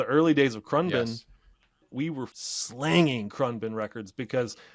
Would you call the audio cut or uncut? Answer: cut